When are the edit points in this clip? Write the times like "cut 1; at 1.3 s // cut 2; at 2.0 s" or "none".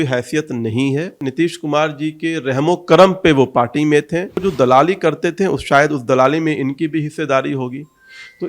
cut 1; at 1.2 s // cut 2; at 4.4 s